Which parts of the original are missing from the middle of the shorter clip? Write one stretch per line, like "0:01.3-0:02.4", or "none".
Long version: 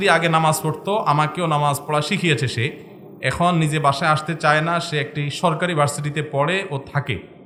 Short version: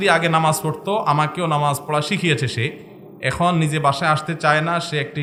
none